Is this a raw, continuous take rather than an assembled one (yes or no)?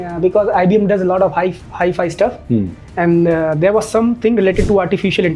yes